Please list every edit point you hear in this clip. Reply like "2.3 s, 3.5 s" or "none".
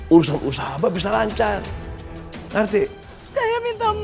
3.1 s